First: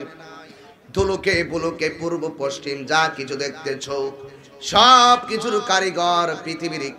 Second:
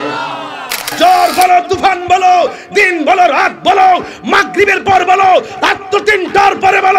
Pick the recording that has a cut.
second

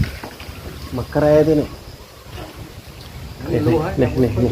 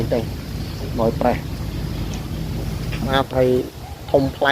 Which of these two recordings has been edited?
second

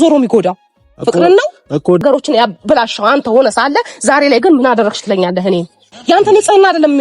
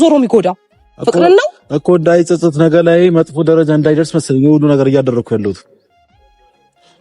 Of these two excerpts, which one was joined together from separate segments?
first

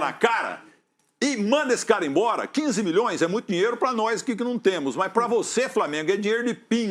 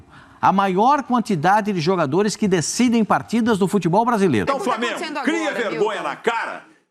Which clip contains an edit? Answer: second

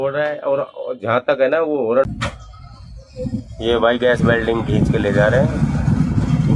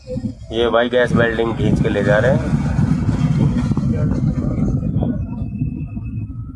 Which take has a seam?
first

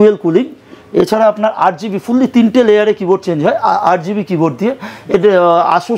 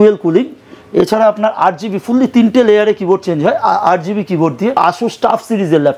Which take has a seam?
second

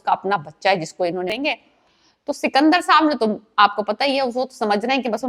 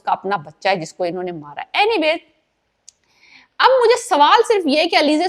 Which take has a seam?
first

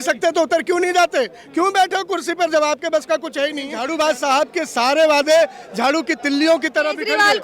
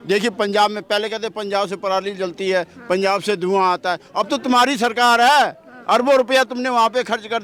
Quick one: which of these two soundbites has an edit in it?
first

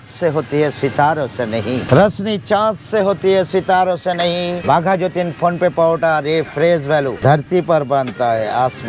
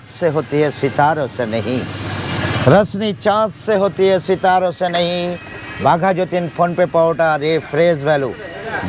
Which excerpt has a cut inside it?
first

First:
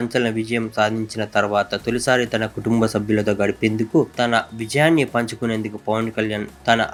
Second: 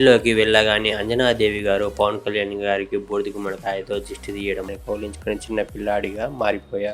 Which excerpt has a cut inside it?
second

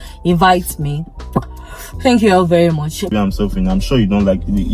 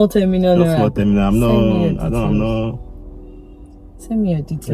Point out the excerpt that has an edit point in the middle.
first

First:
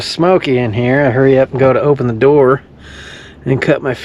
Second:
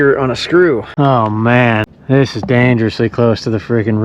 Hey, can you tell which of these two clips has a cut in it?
second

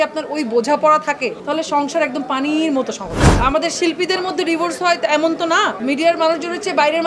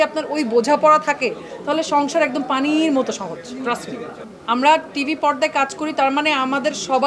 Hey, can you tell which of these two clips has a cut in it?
first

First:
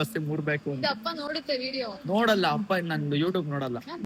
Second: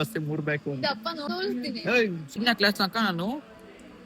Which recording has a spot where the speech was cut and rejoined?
second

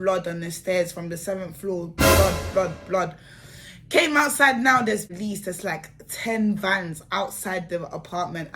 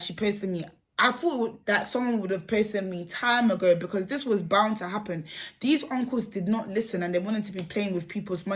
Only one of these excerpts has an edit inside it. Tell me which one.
first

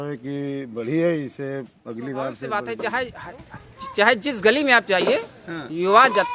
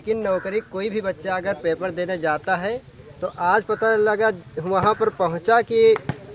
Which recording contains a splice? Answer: first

